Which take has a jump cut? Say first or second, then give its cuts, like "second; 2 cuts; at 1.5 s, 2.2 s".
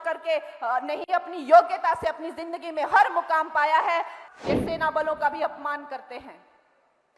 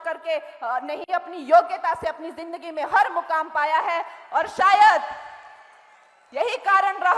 first; 1 cut; at 4.2 s